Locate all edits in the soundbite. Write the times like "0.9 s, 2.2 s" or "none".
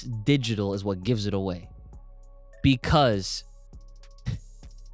none